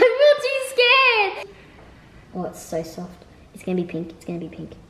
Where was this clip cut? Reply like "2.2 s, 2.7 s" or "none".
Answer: 1.4 s